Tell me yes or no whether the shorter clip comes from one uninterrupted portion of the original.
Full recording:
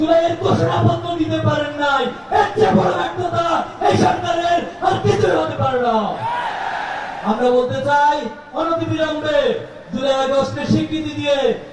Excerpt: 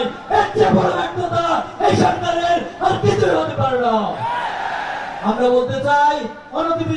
yes